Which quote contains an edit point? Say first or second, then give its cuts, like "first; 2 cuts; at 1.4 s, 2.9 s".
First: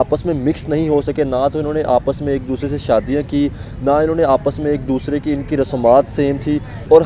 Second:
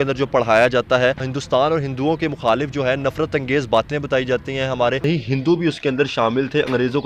second; 1 cut; at 5.0 s